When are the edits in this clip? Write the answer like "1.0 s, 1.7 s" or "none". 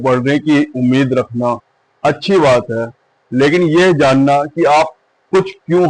none